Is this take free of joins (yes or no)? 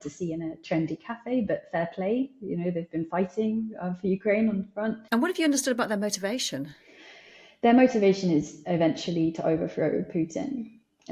no